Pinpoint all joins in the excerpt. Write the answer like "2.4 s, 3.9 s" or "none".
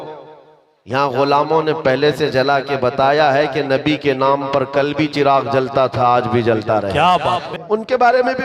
7.5 s